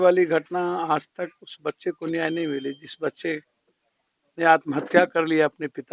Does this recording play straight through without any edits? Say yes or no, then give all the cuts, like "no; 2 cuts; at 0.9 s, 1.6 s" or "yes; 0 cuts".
yes; 0 cuts